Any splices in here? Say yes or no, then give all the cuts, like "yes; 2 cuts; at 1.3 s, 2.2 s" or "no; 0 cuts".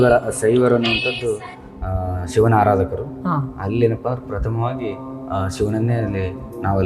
no; 0 cuts